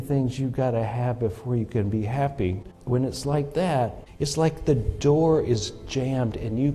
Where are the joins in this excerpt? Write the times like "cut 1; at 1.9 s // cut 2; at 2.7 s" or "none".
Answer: cut 1; at 2.7 s // cut 2; at 4.1 s